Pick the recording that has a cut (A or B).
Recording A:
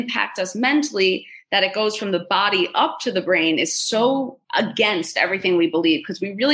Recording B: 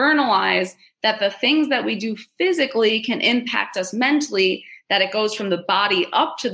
A